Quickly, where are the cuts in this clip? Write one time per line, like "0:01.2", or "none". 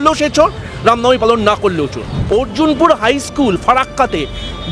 0:02.1